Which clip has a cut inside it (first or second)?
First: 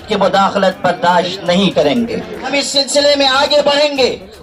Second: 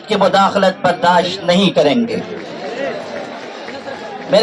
first